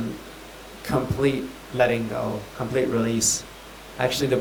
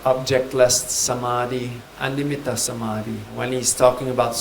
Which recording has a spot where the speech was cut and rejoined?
second; 2 cuts; at 1.9 s, 3.3 s

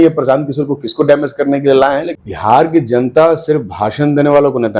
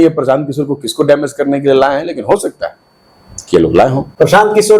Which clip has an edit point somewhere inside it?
first; 1 cut; at 2.2 s

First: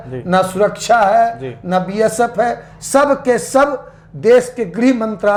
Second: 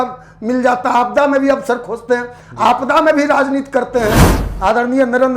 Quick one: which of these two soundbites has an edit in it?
second; 1 cut; at 4.3 s

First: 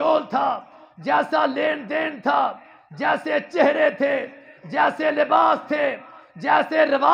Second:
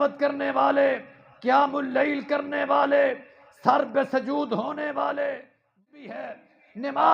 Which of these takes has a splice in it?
second; 1 cut; at 5.8 s

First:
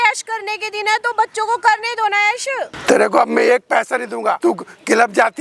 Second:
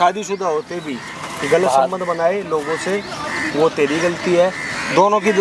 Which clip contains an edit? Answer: first; 2 cuts; at 2.7 s, 4.4 s

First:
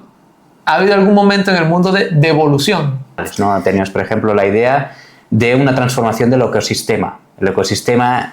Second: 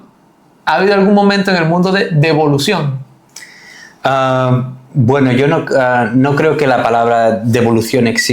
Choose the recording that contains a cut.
first; 1 cut; at 3.3 s

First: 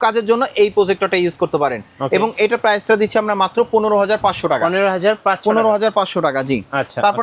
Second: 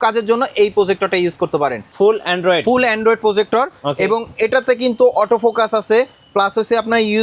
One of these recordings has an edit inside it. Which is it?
second; 1 cut; at 1.8 s

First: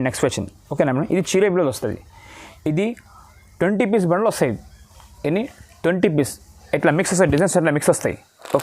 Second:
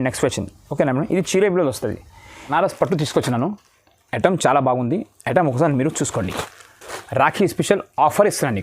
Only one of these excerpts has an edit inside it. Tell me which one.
second; 1 cut; at 2.5 s

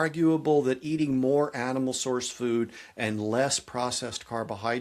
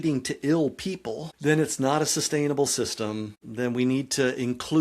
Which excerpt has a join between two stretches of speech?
second; 2 cuts; at 1.3 s, 3.4 s

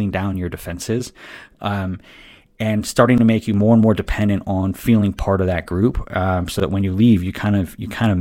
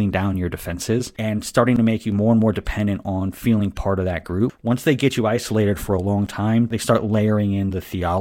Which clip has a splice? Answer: second; 3 cuts; at 1.1 s, 4.6 s, 6.7 s

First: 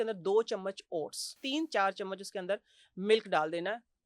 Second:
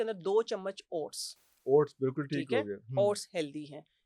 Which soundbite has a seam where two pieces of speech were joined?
first; 1 cut; at 1.4 s

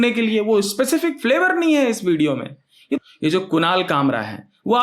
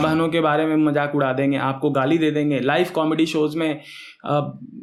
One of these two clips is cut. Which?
first; 1 cut; at 3.0 s

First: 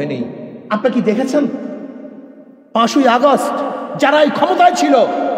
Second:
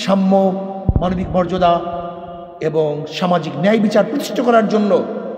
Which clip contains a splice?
first; 1 cut; at 3.9 s

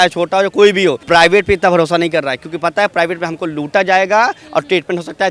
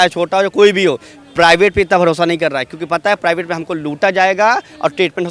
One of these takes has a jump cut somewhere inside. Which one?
first; 1 cut; at 1.0 s

